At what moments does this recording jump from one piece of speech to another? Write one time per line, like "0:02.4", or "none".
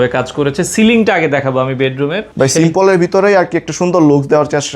0:02.2